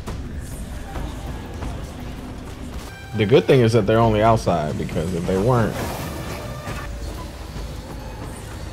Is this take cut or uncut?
cut